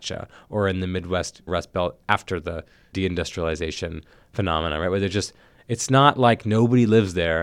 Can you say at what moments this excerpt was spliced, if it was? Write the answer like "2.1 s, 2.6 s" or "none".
1.4 s, 2.8 s